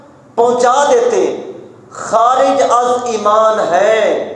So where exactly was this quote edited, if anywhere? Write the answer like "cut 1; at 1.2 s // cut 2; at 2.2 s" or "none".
none